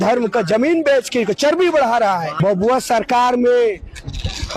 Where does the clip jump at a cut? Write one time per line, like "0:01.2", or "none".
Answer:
none